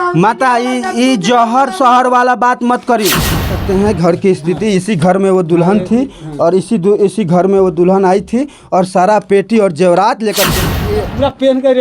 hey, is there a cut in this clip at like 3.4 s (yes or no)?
yes